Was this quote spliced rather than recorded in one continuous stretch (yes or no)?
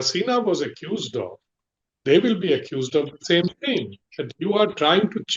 no